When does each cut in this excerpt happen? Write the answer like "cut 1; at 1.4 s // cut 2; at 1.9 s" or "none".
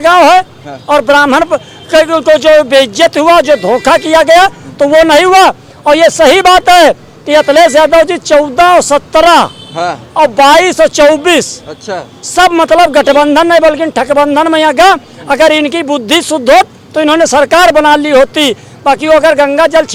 none